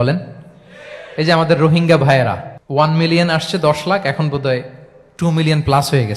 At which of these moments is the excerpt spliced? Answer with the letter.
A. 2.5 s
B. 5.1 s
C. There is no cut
A